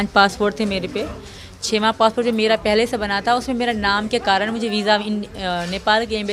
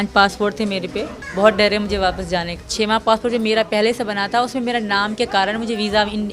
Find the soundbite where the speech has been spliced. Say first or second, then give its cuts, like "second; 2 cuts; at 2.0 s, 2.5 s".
second; 2 cuts; at 1.2 s, 2.6 s